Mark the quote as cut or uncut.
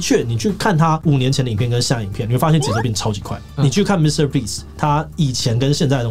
cut